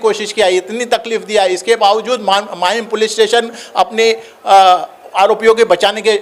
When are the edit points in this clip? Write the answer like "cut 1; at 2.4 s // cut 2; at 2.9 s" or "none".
none